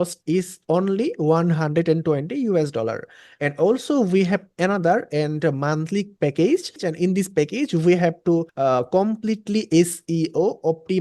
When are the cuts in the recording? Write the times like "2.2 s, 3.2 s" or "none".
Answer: 6.8 s, 8.5 s